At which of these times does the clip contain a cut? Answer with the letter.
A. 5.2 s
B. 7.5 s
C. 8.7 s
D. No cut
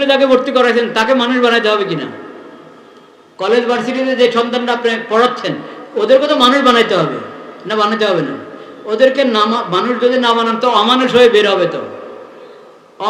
D